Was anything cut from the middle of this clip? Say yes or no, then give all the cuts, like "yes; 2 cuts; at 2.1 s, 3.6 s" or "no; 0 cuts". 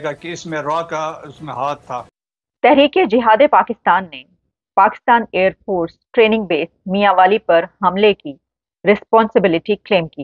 yes; 1 cut; at 2.2 s